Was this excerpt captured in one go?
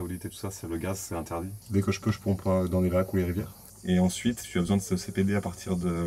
no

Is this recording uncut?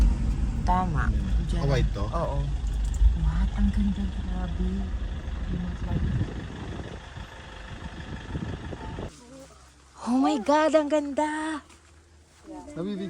no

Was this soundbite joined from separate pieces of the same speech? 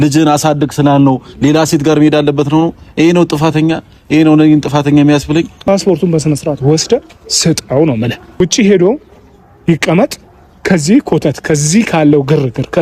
yes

